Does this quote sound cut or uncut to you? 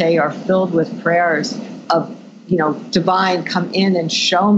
uncut